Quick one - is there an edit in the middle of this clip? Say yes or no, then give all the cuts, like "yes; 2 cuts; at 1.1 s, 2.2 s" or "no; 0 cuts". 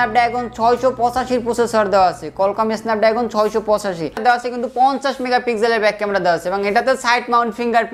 yes; 1 cut; at 4.2 s